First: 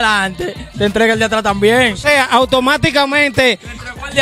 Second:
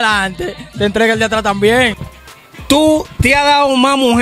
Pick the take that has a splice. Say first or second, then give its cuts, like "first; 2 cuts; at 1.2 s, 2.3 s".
second; 1 cut; at 2.0 s